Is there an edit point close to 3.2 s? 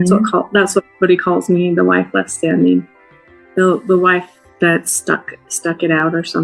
no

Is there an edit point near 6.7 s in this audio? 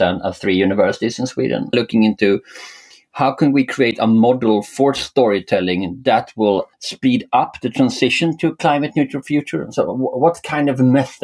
yes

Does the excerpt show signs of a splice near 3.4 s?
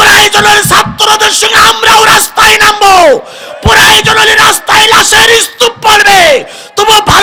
no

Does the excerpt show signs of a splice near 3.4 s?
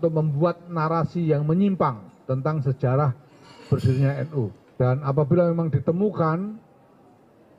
no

